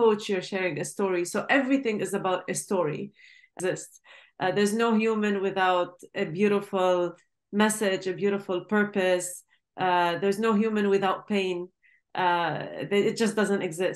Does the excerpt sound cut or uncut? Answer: cut